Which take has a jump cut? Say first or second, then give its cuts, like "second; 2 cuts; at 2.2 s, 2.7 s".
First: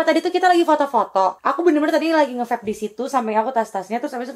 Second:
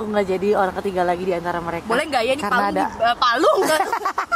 first; 1 cut; at 1.4 s